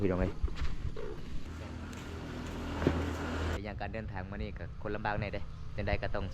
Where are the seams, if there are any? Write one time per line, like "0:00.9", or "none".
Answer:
0:01.4
0:03.6